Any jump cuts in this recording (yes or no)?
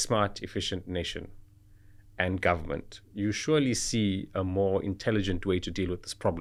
no